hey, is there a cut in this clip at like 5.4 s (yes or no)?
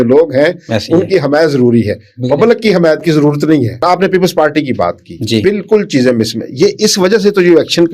no